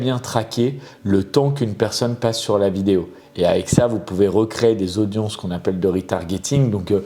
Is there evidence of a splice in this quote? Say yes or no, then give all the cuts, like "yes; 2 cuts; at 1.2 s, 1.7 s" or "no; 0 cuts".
no; 0 cuts